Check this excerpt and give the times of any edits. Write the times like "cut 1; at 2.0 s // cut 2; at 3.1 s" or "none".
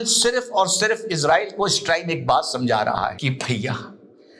cut 1; at 3.2 s

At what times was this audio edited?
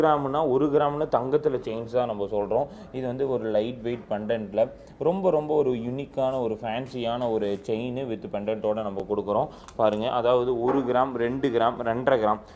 none

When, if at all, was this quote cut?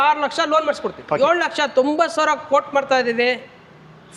cut 1; at 1.1 s

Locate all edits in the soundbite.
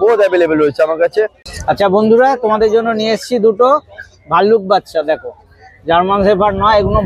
cut 1; at 1.5 s

